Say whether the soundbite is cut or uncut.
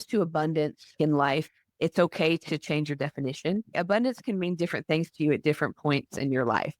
cut